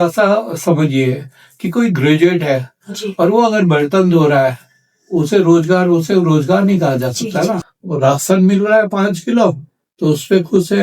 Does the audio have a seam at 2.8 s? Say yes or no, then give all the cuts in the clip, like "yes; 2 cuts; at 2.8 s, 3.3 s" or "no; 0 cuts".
no; 1 cut; at 7.7 s